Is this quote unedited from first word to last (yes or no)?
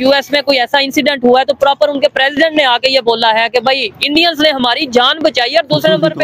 yes